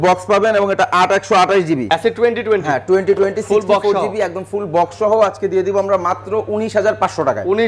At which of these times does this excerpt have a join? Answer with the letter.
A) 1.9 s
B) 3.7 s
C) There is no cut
A